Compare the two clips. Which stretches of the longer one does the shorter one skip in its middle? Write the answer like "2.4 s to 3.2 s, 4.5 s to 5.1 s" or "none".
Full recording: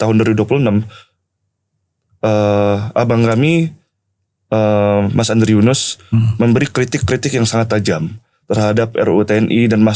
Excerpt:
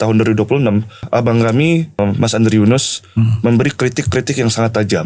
1.0 s to 2.9 s, 3.8 s to 4.9 s